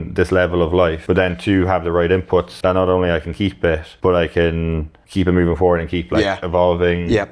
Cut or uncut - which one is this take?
cut